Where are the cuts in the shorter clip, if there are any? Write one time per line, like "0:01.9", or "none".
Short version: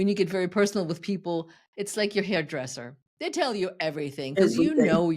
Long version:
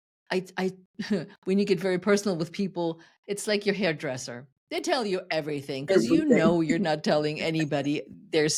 none

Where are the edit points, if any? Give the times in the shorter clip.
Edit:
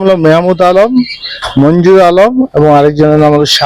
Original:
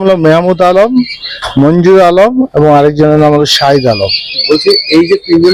none

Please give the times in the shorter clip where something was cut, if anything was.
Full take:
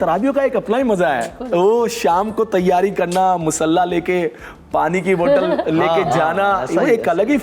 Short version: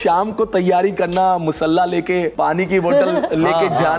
0:02.3

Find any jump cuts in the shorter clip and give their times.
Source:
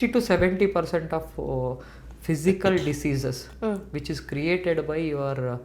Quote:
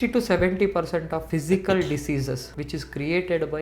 0:01.2
0:02.5

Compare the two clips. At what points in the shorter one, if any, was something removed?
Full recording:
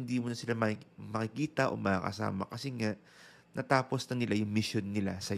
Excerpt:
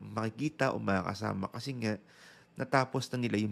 none

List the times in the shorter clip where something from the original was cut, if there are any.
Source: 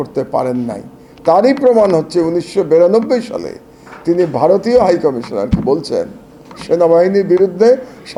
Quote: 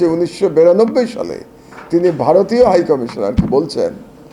none

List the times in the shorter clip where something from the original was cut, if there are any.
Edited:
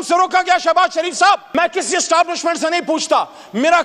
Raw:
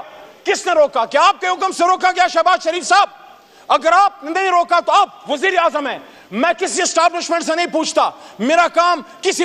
0:01.5

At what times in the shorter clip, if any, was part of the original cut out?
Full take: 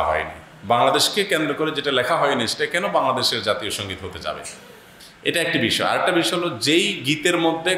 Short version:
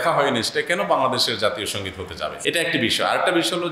0:02.4

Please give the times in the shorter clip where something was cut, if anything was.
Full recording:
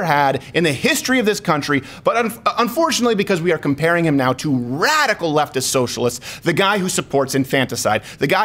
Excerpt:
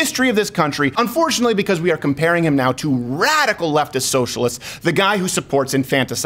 0:00.9

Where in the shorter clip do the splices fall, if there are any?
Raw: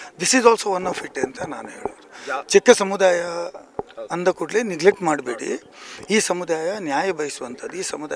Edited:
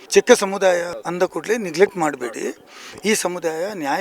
0:00.9

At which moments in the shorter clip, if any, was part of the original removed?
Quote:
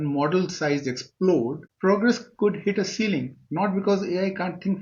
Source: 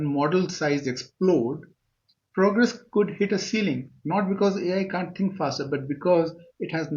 0:01.6

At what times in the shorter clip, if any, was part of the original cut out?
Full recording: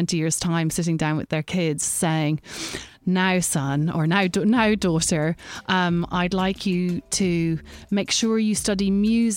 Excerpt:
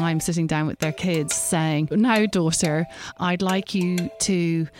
0:01.9
0:03.1

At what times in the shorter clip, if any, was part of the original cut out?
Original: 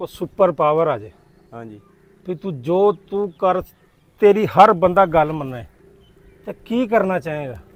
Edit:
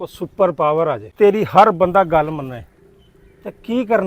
0:01.1

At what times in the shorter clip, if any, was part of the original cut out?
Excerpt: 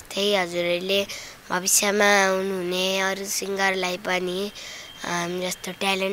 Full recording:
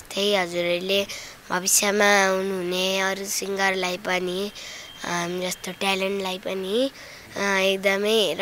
none

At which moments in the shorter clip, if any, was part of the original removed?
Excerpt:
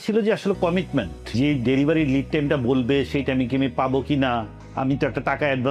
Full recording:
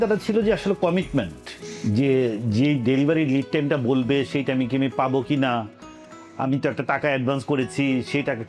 0:01.3
0:04.6

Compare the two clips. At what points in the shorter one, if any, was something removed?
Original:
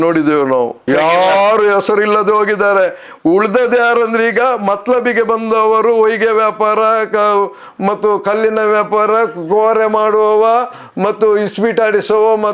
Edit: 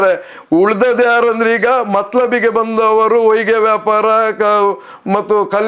none

